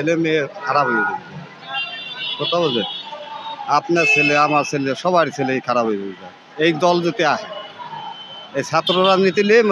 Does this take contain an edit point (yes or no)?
no